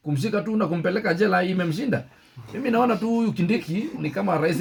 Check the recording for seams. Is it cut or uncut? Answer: uncut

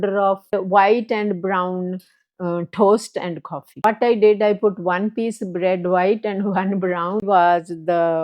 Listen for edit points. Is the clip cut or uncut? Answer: cut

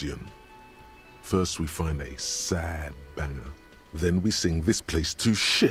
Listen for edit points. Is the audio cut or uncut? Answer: uncut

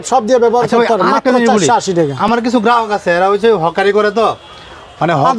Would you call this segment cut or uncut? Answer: uncut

